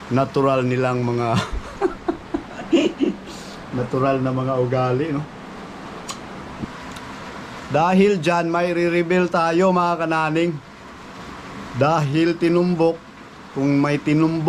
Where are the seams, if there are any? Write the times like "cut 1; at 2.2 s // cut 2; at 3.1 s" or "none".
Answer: cut 1; at 6.6 s